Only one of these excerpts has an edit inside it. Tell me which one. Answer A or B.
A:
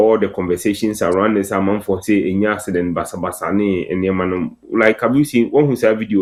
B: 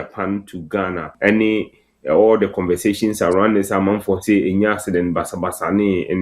B